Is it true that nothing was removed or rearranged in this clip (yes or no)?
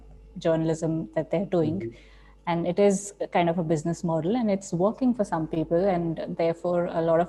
yes